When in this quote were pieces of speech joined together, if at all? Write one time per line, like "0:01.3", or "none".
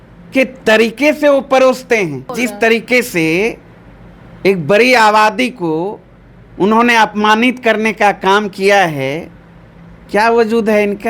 0:02.4